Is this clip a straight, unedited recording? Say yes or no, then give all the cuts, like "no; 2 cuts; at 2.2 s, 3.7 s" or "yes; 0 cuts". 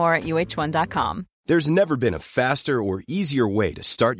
yes; 0 cuts